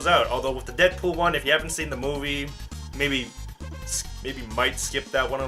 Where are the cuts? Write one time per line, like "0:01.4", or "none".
0:01.2